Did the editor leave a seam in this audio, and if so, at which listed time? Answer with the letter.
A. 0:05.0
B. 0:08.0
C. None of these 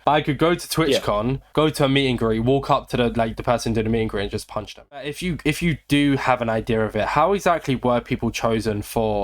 A